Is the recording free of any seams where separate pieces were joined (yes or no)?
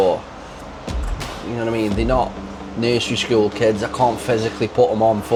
yes